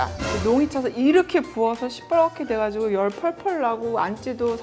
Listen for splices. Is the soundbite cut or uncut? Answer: uncut